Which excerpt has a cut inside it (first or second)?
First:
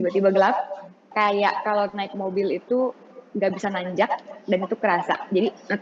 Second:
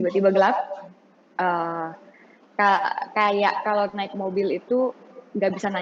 first